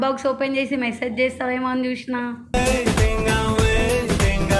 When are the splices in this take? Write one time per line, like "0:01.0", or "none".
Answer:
none